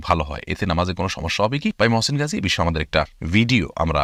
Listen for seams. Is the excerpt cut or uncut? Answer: uncut